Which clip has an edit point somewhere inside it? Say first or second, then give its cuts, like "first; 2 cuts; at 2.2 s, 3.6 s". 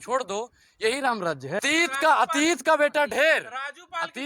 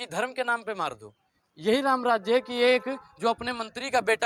first; 1 cut; at 1.6 s